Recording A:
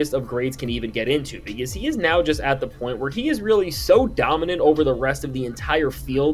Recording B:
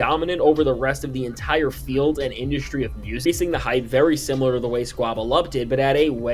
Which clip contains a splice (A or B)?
B